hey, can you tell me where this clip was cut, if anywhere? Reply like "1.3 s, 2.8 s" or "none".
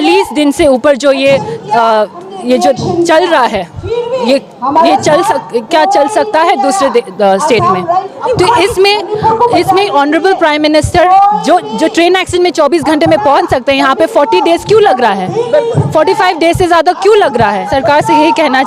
8.1 s, 17.6 s